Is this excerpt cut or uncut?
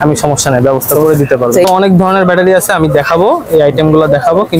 cut